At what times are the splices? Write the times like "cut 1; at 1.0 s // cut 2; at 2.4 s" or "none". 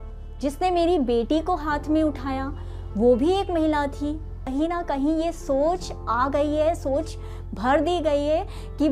cut 1; at 4.4 s